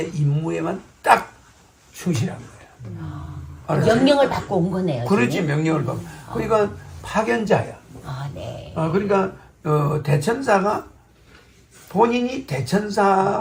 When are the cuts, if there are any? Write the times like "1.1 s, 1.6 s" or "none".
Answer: none